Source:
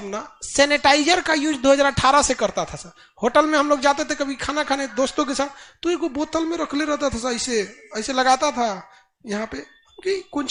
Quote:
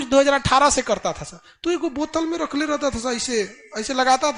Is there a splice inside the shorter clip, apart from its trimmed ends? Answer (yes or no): yes